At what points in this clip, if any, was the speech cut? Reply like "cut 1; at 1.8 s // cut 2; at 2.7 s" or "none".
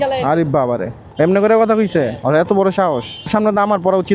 cut 1; at 1.0 s // cut 2; at 3.3 s